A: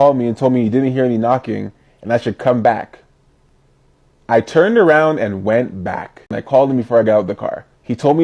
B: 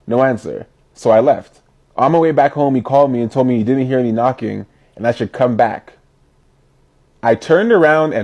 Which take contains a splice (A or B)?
A